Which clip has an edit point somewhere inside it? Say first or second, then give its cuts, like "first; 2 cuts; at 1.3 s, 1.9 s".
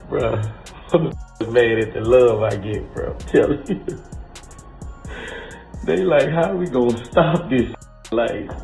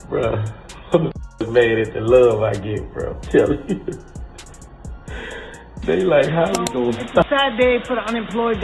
second; 1 cut; at 7.3 s